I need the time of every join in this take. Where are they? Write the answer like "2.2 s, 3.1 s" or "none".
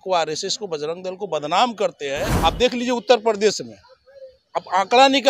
2.3 s